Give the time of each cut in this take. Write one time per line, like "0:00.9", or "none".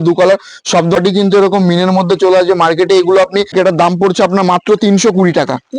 0:01.0
0:03.5